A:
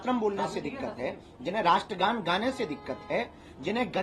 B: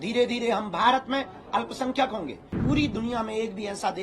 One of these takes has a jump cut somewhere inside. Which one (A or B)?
B